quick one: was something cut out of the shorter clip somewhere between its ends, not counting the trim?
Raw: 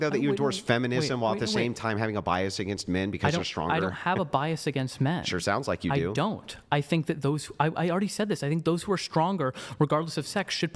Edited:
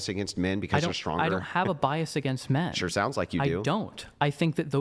no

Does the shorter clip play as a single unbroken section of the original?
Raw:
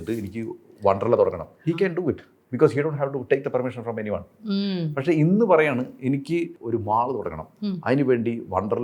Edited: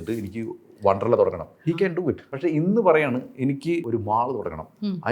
no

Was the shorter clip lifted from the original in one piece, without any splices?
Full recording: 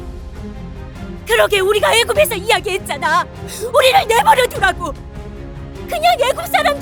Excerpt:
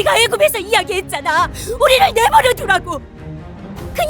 no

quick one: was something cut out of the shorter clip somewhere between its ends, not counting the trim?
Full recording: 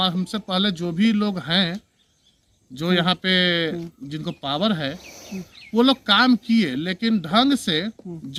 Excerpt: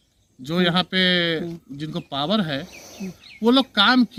no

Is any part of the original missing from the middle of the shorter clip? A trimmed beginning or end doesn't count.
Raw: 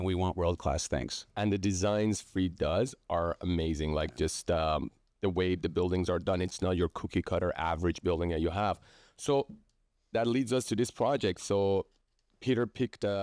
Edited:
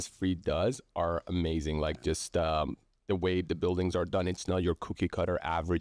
no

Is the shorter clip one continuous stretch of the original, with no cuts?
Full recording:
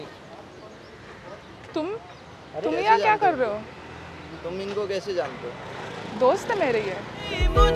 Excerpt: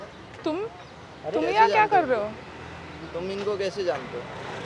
yes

